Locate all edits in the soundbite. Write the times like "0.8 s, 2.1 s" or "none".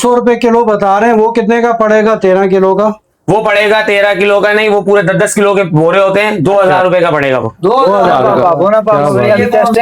8.2 s